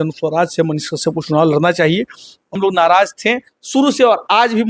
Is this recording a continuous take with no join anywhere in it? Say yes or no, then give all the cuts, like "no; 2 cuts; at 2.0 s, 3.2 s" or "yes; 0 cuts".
no; 1 cut; at 2.6 s